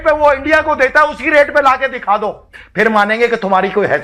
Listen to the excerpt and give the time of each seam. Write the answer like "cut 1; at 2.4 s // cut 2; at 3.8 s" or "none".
none